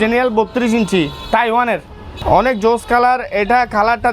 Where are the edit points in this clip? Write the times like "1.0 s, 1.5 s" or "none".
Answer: 2.2 s